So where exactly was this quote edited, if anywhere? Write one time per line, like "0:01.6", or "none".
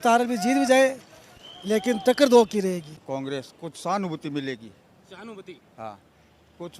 0:03.0